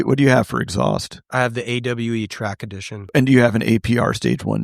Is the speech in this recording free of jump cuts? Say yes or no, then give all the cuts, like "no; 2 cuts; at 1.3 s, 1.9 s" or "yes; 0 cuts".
no; 2 cuts; at 1.2 s, 3.1 s